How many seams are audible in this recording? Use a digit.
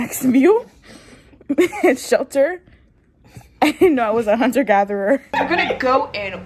1